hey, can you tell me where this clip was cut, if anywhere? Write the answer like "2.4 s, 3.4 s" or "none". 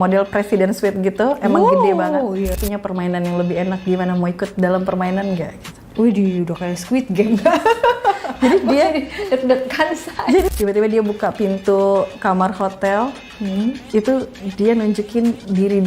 2.6 s, 10.5 s

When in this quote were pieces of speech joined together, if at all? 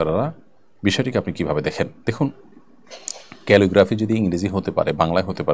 none

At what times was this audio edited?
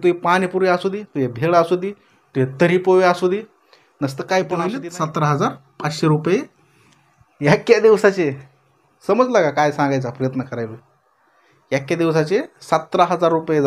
4.8 s

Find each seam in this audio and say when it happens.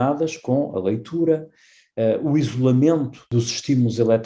3.3 s

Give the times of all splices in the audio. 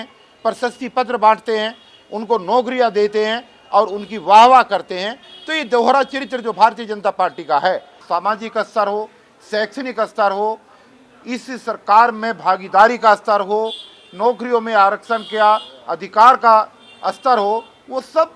7.9 s

